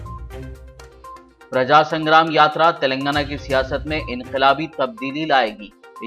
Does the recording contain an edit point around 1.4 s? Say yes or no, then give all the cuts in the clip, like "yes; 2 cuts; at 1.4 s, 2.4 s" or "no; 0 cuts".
yes; 1 cut; at 1.4 s